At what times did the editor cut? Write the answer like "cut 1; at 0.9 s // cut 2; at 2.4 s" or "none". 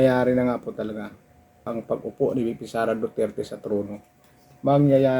cut 1; at 1.7 s